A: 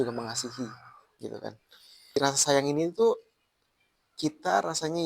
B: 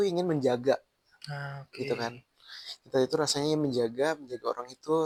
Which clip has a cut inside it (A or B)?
A